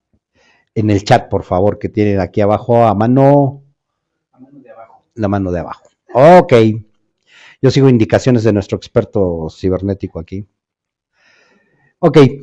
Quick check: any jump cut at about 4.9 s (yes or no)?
no